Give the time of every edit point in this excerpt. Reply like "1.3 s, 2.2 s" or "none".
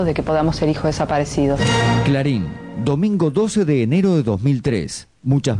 2.0 s